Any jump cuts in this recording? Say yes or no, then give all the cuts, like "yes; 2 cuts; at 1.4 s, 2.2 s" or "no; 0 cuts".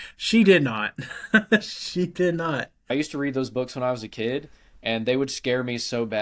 yes; 1 cut; at 2.9 s